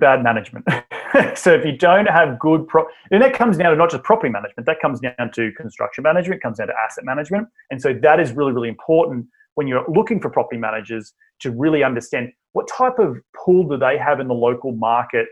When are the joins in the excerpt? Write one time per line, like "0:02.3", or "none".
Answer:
0:07.6